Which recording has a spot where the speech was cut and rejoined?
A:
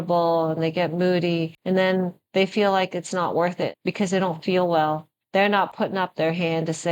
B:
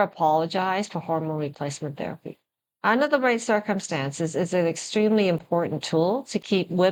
A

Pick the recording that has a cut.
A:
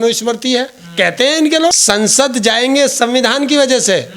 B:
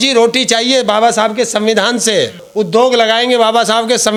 A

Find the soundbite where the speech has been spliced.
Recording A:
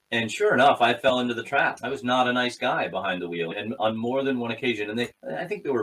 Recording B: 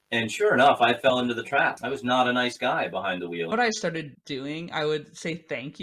B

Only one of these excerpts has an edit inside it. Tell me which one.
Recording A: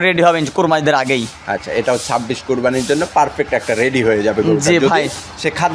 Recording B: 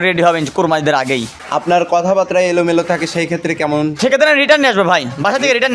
B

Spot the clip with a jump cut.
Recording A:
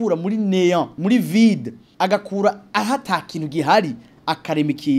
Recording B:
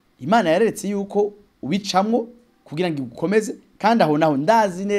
A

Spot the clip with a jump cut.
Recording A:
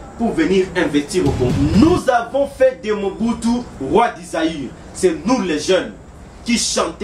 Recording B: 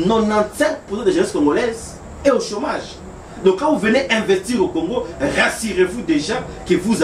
A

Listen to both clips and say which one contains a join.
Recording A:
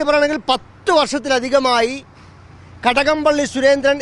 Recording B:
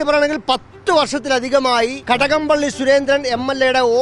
B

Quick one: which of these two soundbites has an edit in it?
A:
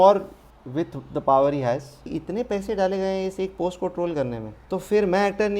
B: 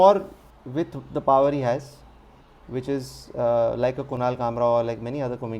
A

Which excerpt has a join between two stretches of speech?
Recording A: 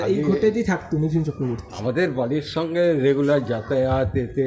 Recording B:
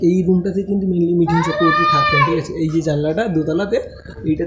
A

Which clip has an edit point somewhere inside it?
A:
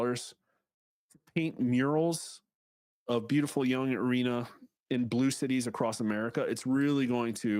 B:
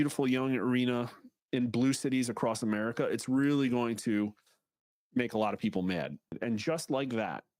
B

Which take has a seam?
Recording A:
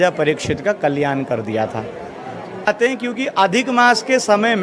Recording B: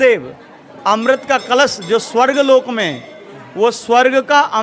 A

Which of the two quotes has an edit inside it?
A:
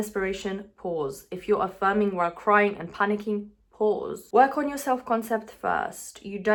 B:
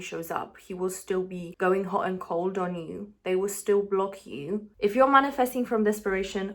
B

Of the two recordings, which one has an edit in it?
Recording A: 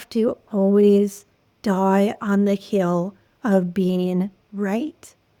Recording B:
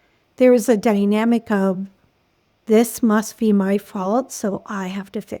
B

